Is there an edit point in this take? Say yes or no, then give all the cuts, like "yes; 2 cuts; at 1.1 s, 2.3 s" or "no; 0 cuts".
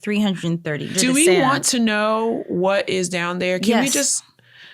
yes; 1 cut; at 0.9 s